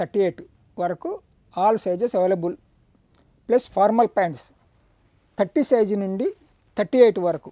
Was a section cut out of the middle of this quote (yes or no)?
no